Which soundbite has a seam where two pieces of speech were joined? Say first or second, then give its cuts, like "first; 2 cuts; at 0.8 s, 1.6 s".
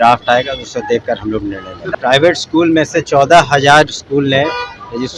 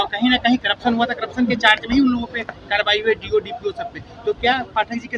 first; 1 cut; at 1.9 s